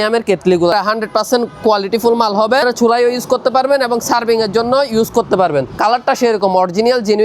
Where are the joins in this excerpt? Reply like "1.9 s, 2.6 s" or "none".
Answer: 0.7 s, 2.6 s, 5.7 s